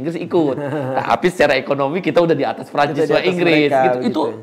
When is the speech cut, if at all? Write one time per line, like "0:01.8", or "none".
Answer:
none